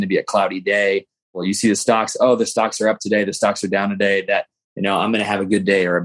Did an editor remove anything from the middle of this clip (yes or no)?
yes